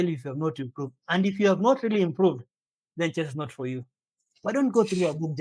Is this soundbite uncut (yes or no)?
yes